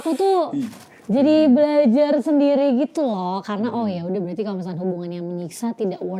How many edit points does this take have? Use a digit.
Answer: 0